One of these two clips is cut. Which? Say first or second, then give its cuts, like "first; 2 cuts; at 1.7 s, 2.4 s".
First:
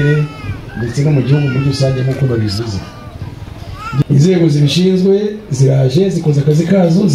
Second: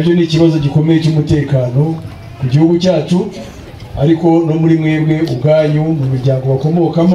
first; 1 cut; at 4.0 s